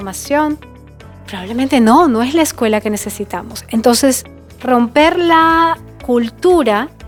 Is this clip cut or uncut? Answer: uncut